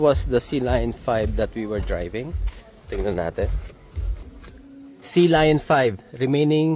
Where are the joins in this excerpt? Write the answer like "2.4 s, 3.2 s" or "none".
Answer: none